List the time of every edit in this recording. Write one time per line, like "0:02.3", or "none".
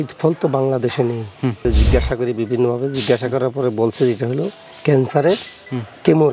0:01.6